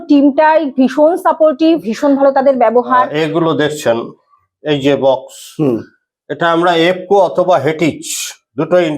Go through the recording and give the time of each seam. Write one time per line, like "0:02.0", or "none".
0:03.1